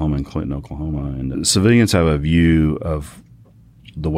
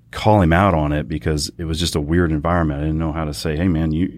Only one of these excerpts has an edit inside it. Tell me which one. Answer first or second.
first